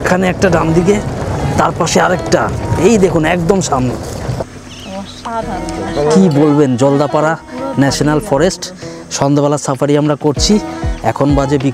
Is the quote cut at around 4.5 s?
yes; 1 cut; at 4.5 s

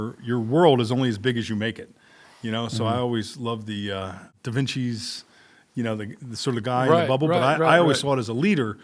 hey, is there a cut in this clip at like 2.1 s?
no; 1 cut; at 4.3 s

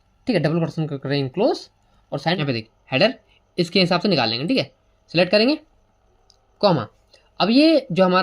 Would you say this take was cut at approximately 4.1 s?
no; 1 cut; at 2.4 s

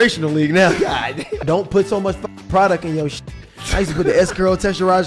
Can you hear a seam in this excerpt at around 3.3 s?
no; 1 cut; at 1.4 s

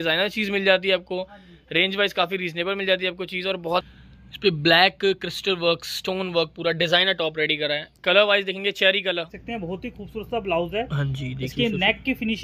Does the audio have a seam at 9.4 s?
yes; 2 cuts; at 3.9 s, 9.4 s

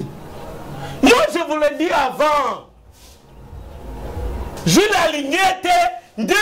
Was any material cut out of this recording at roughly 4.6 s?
yes; 1 cut; at 4.6 s

